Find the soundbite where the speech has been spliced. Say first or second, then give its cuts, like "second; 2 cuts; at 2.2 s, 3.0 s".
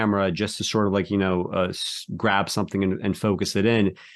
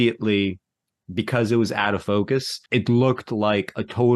second; 1 cut; at 2.6 s